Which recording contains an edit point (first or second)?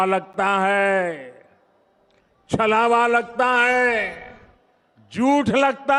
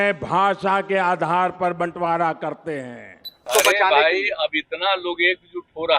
second